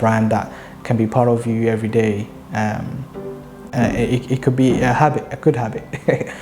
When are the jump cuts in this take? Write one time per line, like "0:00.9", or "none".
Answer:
0:03.7